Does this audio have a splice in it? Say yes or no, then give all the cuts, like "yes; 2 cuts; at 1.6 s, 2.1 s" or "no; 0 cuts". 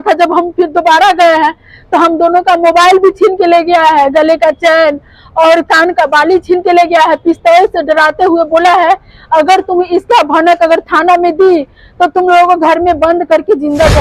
no; 0 cuts